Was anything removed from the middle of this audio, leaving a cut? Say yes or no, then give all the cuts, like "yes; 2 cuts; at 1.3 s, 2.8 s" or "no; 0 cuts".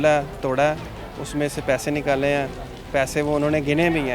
no; 0 cuts